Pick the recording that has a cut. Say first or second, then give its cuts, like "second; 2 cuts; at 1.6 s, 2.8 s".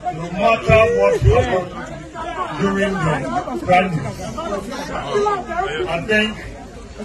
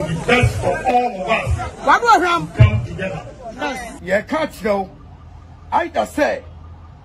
second; 1 cut; at 3.9 s